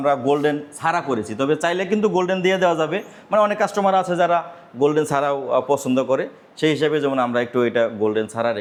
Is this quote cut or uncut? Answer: uncut